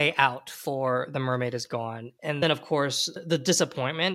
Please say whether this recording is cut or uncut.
cut